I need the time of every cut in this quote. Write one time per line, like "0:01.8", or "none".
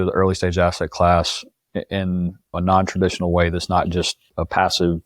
0:02.5